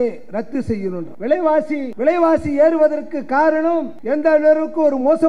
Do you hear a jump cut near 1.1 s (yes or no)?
yes